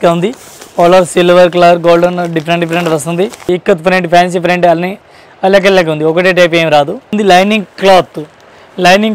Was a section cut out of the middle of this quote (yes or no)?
yes